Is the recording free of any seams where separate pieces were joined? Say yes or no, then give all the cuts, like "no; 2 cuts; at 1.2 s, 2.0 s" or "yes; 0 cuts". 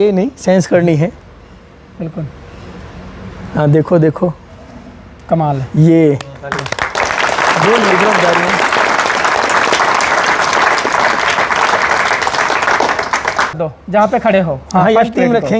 no; 1 cut; at 13.5 s